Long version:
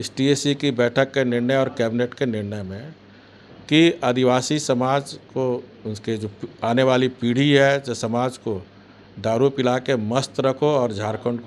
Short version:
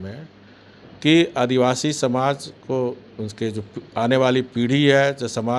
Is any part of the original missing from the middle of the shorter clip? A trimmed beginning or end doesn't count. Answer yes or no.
no